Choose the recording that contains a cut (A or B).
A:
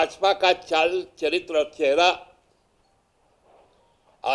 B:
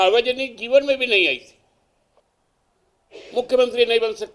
B